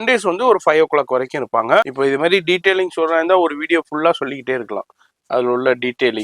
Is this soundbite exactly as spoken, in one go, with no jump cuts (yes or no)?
no